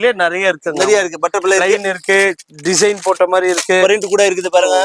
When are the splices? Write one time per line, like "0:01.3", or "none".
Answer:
none